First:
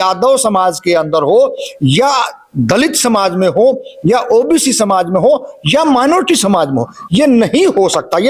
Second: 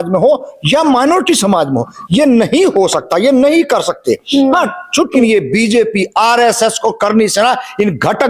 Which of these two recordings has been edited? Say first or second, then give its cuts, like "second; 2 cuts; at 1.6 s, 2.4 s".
second; 1 cut; at 5.2 s